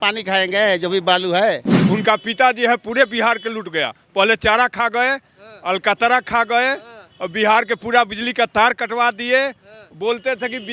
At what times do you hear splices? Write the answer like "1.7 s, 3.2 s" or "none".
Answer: 1.7 s

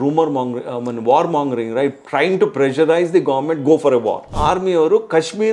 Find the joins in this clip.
4.3 s

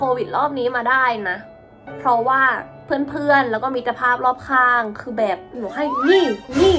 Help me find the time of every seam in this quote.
5.6 s

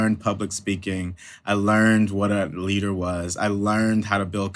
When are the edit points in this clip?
none

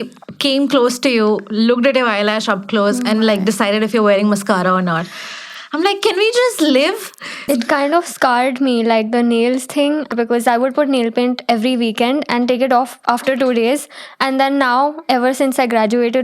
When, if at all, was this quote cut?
7.4 s

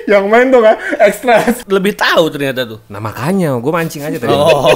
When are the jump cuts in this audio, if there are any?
1.6 s

